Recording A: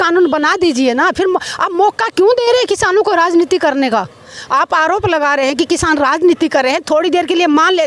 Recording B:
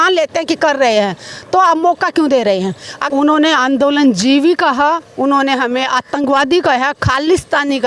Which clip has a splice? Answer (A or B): B